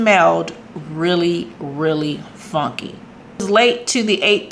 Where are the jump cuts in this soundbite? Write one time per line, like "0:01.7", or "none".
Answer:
0:03.3